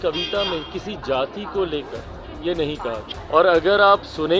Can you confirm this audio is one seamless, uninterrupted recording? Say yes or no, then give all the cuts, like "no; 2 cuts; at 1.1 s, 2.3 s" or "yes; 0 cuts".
no; 1 cut; at 3.1 s